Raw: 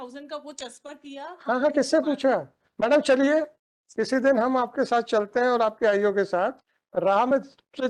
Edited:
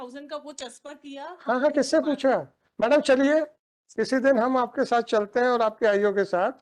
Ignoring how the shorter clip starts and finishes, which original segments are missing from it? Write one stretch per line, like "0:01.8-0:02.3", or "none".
none